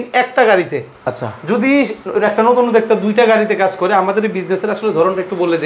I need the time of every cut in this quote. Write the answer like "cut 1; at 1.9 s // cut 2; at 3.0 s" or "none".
none